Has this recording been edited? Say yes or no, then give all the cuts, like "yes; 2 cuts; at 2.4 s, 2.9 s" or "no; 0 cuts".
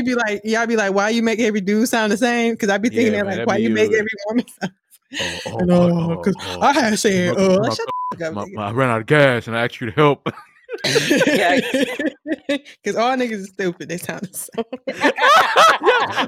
no; 0 cuts